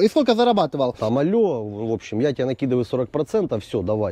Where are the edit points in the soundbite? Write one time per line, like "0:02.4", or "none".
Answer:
0:01.0